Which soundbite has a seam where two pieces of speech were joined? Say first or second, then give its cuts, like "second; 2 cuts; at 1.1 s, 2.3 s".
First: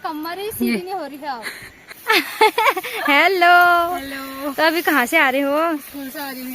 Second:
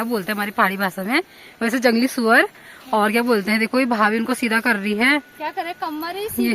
first; 1 cut; at 1.9 s